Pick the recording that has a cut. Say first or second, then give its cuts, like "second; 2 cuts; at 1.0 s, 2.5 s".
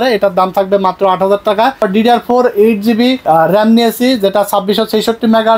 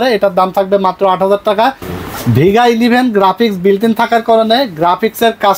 first; 1 cut; at 1.8 s